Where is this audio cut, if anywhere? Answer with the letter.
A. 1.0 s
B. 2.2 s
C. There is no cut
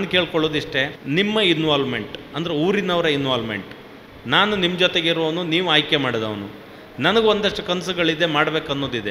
A